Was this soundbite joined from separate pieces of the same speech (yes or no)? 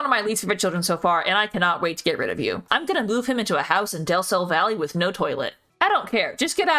yes